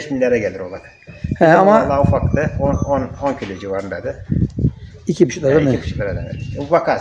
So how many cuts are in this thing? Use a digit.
0